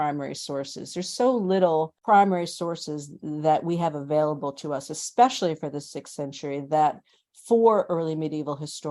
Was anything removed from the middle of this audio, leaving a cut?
yes; 1 cut; at 1.9 s

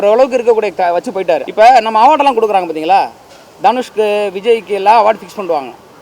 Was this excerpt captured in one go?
no; 1 cut; at 1.5 s

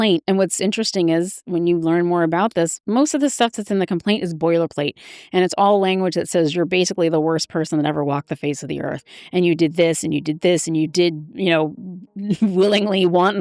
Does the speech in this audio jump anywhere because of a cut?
no; 0 cuts

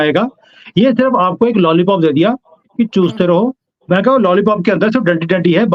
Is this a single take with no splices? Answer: yes; 0 cuts

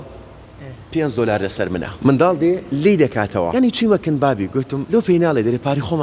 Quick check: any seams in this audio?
yes; 3 cuts; at 1.9 s, 3.5 s, 4.8 s

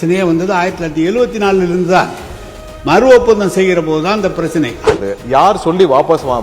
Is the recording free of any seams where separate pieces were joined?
no; 1 cut; at 4.9 s

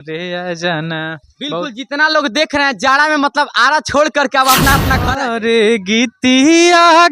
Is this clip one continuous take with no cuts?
no; 1 cut; at 5.3 s

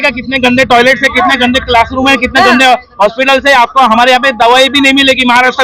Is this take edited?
no; 0 cuts

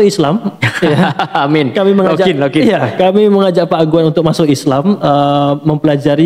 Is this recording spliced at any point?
no; 0 cuts

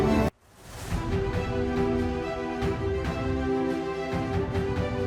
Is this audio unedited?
yes; 0 cuts

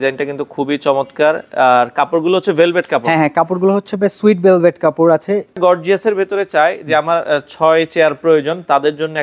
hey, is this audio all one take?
no; 1 cut; at 5.6 s

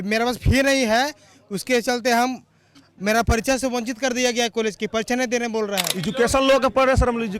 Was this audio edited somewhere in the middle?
yes; 1 cut; at 5.9 s

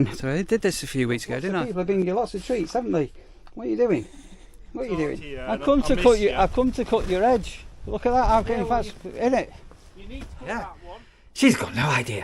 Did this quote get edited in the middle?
yes; 3 cuts; at 1.5 s, 5.3 s, 10.8 s

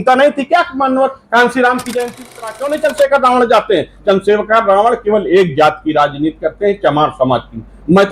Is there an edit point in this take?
yes; 1 cut; at 2.3 s

